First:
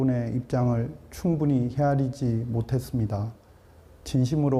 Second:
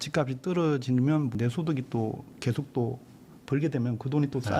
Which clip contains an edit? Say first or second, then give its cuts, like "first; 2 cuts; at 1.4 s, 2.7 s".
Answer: second; 1 cut; at 1.2 s